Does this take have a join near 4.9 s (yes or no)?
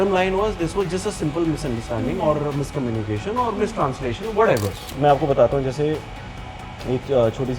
yes